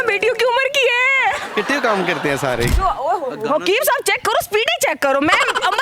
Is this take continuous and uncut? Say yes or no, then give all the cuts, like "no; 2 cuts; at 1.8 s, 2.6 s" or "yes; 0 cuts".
no; 1 cut; at 2.7 s